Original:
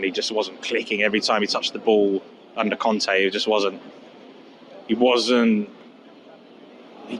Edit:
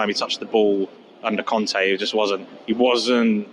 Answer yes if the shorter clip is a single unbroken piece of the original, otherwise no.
no